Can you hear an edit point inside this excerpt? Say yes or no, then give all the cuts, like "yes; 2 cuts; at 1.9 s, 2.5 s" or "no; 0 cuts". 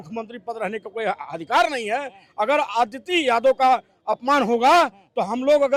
no; 0 cuts